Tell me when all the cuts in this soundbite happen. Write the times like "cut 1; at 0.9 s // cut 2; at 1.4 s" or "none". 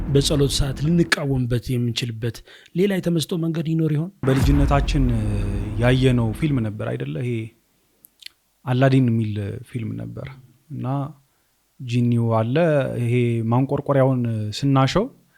cut 1; at 4.2 s